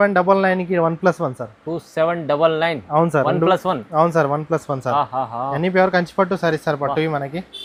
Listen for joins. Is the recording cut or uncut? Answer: uncut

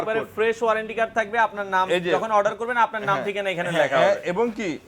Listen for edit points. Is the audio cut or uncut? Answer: uncut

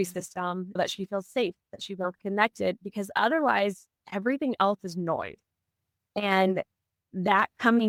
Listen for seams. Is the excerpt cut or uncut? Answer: uncut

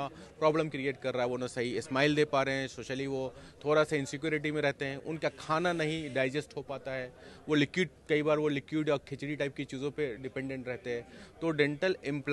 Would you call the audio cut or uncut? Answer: uncut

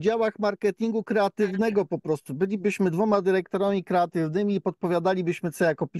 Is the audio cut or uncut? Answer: uncut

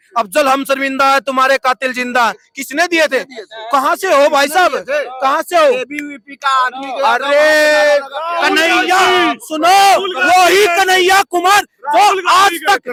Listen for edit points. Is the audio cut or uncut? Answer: uncut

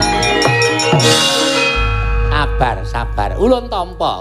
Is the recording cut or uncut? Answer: cut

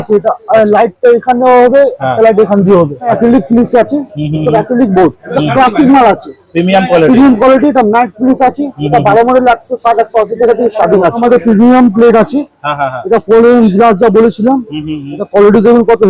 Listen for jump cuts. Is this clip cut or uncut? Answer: cut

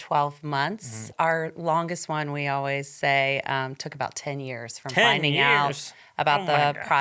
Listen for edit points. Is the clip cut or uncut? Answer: cut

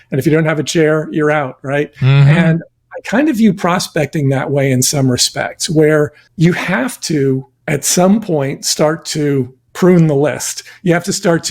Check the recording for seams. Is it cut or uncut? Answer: cut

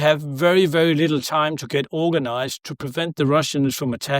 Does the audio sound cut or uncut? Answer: uncut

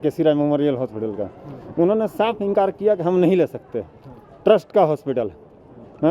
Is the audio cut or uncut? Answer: uncut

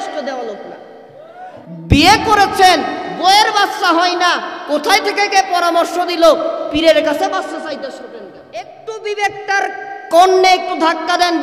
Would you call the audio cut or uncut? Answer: cut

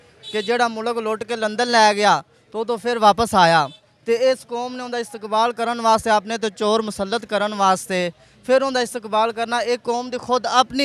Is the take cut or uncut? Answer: uncut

